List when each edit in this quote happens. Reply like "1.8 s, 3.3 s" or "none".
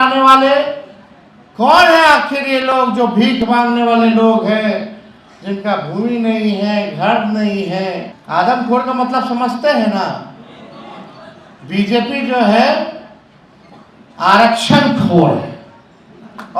8.1 s